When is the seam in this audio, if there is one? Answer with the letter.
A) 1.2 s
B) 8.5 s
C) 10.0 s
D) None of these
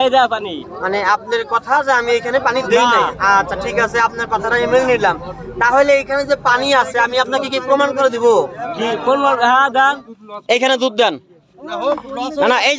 C